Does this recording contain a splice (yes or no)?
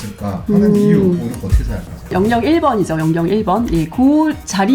yes